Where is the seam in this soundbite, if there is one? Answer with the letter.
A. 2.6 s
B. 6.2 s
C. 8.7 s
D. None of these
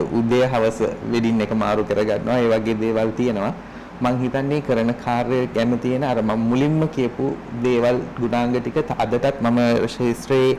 D